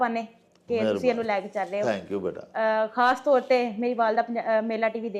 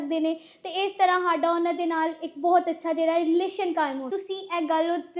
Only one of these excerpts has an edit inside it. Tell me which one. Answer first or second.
second